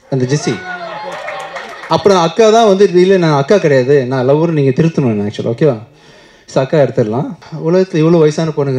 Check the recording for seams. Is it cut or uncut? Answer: cut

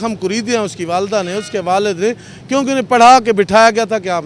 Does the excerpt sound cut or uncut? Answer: uncut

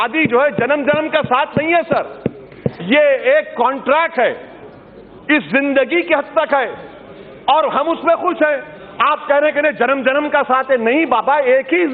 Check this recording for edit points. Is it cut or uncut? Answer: uncut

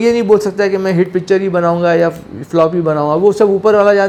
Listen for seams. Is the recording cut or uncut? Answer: uncut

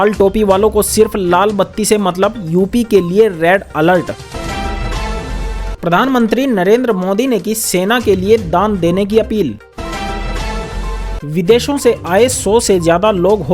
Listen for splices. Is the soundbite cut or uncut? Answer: cut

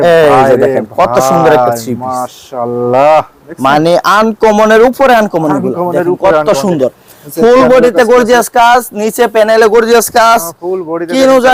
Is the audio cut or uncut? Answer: uncut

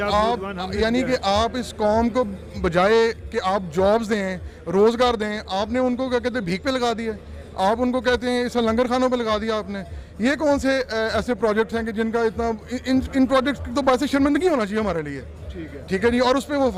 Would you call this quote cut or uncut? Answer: uncut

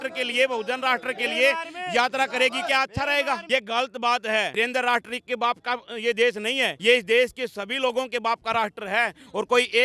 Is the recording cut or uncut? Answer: cut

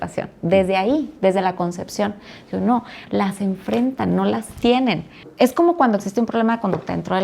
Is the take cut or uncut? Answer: cut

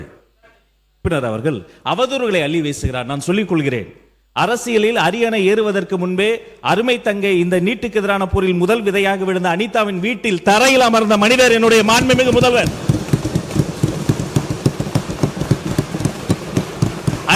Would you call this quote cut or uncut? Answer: cut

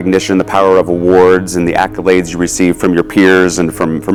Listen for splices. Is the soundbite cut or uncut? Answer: uncut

